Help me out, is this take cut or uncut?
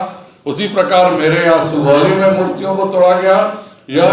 uncut